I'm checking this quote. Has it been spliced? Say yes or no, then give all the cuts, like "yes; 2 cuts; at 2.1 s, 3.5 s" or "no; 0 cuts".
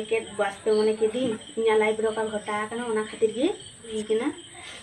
yes; 1 cut; at 3.9 s